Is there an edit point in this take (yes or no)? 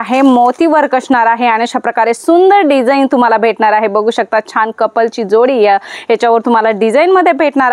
no